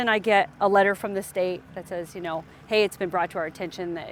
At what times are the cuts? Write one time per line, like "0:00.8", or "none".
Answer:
none